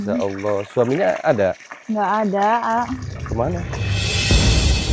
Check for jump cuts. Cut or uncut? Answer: uncut